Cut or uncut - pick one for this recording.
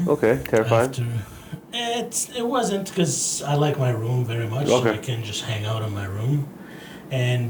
uncut